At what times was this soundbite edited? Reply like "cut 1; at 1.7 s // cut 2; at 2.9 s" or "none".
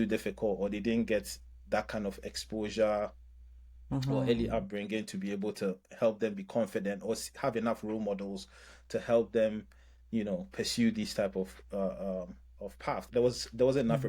cut 1; at 13.1 s